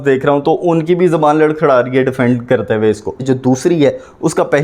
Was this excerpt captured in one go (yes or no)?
no